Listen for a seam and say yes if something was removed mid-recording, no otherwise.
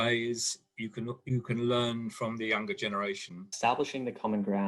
yes